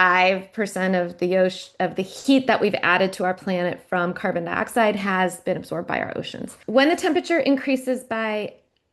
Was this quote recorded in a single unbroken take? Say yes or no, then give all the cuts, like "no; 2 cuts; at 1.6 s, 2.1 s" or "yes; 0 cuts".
no; 1 cut; at 6.6 s